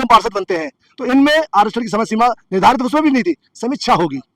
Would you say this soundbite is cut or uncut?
uncut